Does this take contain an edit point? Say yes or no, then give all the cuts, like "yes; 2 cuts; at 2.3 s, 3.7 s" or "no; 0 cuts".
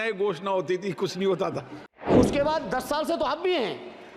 yes; 1 cut; at 2.1 s